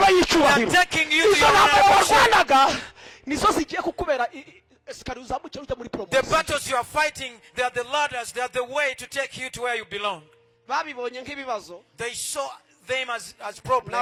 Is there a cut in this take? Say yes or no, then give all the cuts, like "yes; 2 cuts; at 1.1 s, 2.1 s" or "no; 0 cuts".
no; 0 cuts